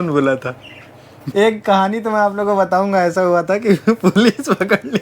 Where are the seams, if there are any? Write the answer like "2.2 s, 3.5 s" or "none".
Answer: 1.2 s